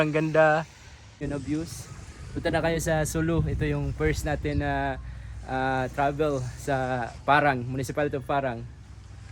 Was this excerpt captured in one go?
no; 1 cut; at 1.2 s

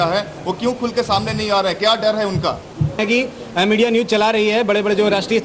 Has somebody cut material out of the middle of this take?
yes; 1 cut; at 3.0 s

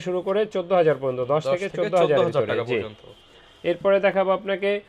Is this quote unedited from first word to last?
yes; 0 cuts

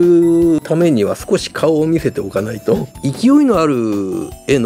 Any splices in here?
yes; 1 cut; at 2.9 s

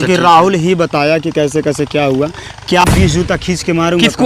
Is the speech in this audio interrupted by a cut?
yes; 1 cut; at 2.8 s

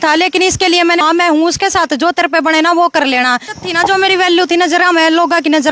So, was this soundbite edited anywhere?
yes; 2 cuts; at 1.0 s, 3.5 s

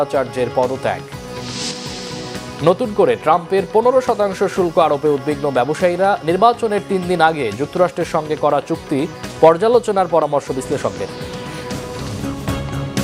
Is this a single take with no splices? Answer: no; 1 cut; at 12.0 s

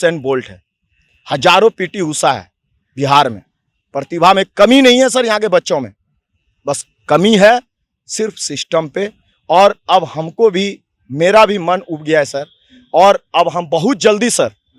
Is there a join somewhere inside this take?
no; 0 cuts

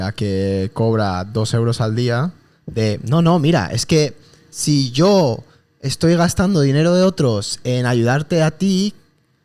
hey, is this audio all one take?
yes; 0 cuts

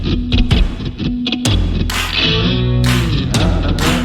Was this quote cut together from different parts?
no; 0 cuts

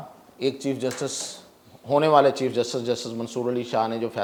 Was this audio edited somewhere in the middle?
no; 0 cuts

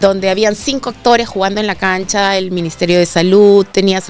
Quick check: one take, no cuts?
yes; 0 cuts

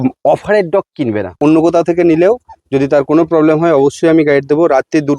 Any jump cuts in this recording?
yes; 1 cut; at 1.3 s

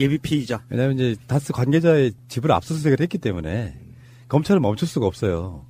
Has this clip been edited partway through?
no; 0 cuts

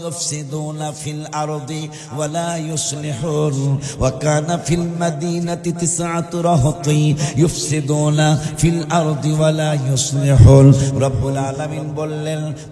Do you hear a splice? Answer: no; 0 cuts

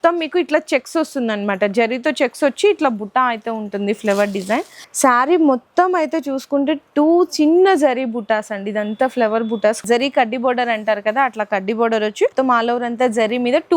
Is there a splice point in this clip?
yes; 3 cuts; at 4.7 s, 9.8 s, 12.3 s

